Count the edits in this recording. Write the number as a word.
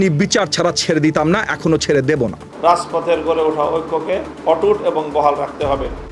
two